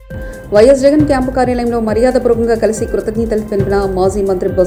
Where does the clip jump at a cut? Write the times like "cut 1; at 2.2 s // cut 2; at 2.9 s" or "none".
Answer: none